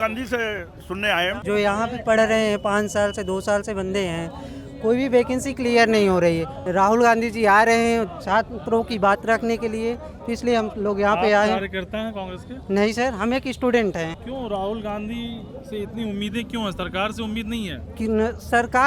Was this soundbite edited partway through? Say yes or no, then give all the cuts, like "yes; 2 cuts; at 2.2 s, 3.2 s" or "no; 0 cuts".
yes; 3 cuts; at 1.4 s, 6.6 s, 14.2 s